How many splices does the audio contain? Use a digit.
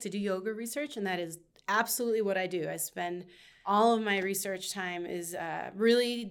1